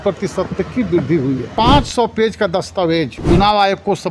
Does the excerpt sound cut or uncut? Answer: cut